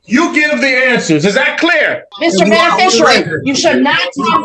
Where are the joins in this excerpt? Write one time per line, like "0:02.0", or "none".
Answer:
0:02.1